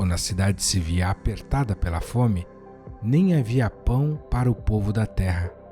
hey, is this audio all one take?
no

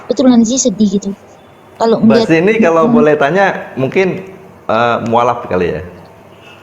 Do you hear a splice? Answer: no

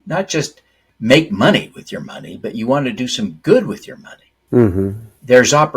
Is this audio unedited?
yes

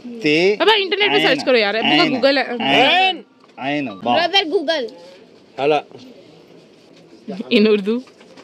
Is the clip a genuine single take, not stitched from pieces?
yes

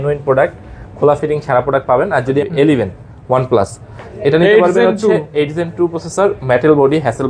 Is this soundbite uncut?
no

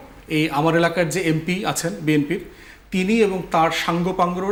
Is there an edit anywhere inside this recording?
no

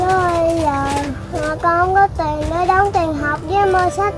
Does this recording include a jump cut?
no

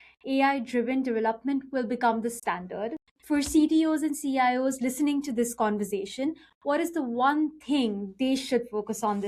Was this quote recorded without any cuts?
no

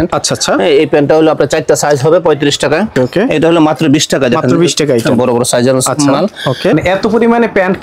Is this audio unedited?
no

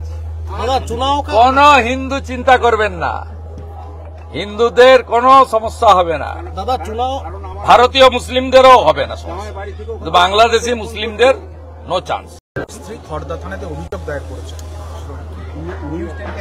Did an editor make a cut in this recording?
yes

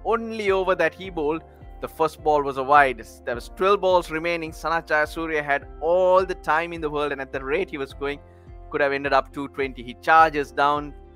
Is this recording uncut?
yes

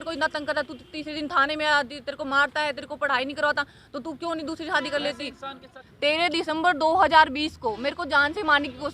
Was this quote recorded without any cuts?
no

